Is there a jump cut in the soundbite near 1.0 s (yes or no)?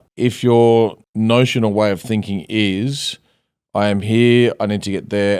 yes